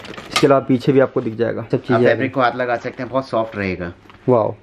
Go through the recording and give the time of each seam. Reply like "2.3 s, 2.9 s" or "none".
1.7 s